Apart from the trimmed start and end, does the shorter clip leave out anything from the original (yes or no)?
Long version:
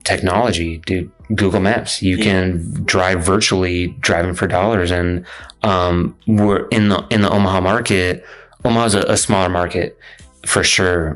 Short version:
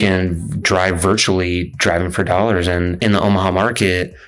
yes